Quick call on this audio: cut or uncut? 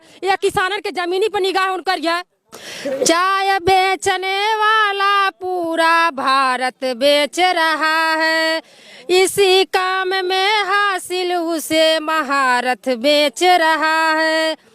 cut